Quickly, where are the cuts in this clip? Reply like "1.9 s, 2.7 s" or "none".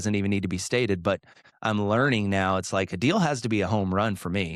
1.4 s